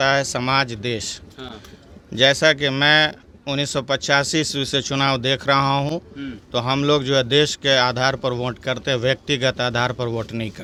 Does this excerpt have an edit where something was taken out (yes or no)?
no